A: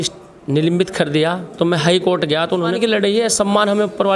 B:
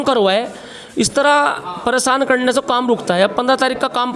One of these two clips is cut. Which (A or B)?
A